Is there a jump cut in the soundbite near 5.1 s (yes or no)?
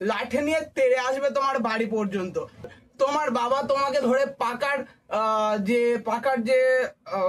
no